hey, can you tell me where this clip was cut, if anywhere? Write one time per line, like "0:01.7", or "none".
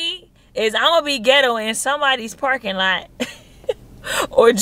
none